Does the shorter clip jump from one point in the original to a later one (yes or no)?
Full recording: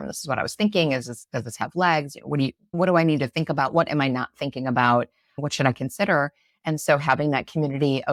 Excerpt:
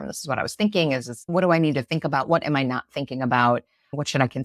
yes